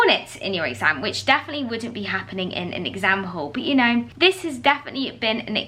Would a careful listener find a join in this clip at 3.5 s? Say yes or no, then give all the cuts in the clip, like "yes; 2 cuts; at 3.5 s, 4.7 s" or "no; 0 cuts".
no; 0 cuts